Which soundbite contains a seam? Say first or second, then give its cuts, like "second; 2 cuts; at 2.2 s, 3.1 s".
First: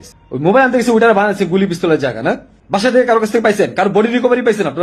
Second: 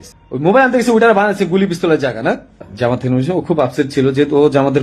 second; 1 cut; at 2.5 s